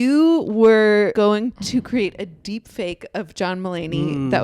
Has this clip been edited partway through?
yes; 1 cut; at 1.1 s

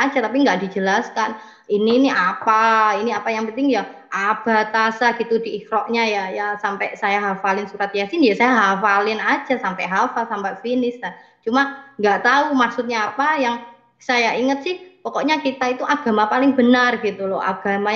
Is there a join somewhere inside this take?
no; 0 cuts

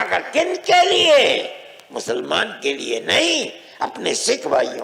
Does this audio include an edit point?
no; 0 cuts

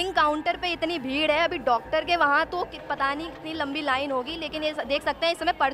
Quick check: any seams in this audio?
no; 0 cuts

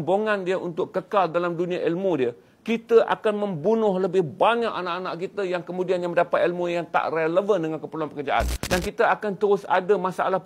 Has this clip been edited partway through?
yes; 1 cut; at 8.6 s

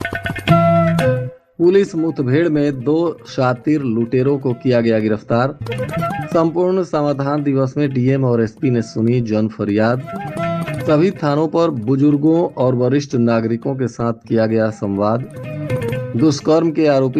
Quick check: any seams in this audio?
yes; 1 cut; at 1.3 s

